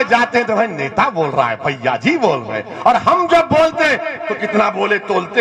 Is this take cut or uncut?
uncut